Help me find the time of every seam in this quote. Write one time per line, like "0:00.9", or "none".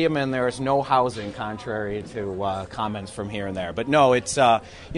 none